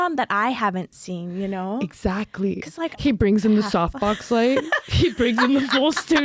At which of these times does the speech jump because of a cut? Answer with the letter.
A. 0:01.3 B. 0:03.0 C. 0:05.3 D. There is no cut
B